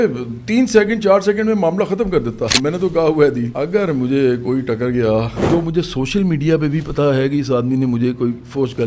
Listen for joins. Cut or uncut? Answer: cut